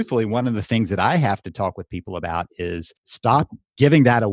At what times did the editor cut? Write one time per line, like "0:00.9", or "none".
0:03.0